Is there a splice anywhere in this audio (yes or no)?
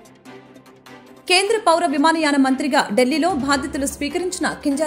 no